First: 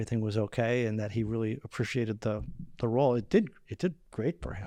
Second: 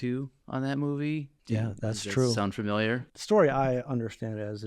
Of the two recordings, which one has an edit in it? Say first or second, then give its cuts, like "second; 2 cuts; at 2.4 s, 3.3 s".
second; 2 cuts; at 1.3 s, 3.1 s